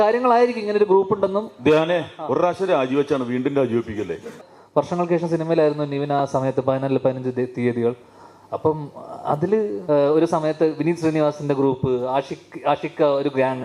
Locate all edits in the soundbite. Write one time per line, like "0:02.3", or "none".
0:04.4
0:09.8